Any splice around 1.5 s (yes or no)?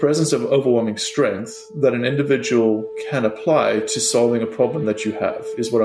no